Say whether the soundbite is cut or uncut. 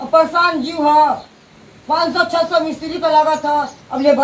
uncut